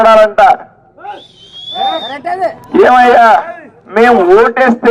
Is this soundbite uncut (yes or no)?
yes